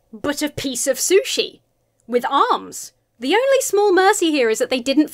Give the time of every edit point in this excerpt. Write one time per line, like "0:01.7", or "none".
0:03.2